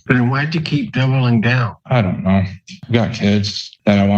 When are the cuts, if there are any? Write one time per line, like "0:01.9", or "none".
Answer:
0:01.7
0:02.8